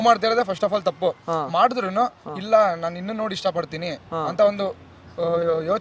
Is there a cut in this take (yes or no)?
no